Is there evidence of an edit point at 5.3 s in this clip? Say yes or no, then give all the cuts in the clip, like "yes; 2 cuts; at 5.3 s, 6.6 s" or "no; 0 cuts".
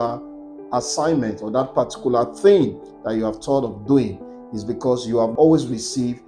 yes; 1 cut; at 5.3 s